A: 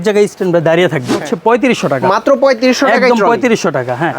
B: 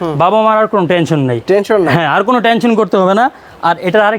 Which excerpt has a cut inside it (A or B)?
A